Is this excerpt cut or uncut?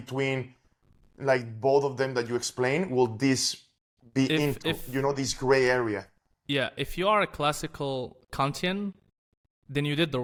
uncut